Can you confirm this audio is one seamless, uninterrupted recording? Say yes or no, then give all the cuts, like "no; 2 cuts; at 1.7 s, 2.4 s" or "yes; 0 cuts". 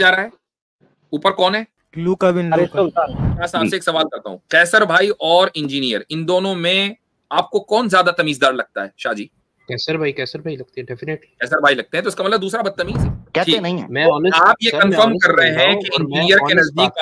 no; 3 cuts; at 1.8 s, 3.4 s, 13.1 s